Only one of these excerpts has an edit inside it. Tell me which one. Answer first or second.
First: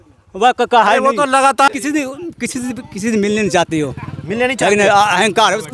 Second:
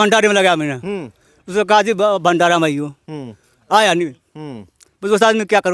first